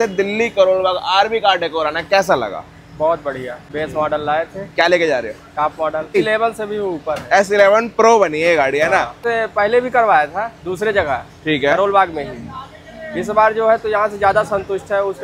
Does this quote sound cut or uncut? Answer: cut